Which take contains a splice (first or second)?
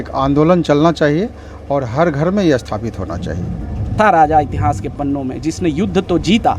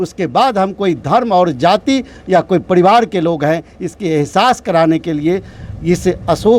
first